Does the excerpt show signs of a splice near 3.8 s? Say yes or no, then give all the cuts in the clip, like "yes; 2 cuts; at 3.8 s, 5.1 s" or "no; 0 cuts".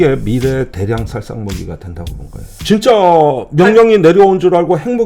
no; 1 cut; at 2.6 s